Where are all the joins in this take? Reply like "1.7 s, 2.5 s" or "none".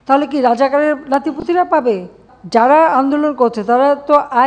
2.3 s